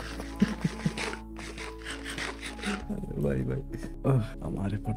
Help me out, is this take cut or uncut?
uncut